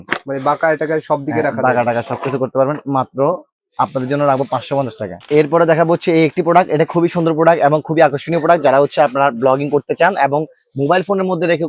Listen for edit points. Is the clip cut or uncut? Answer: cut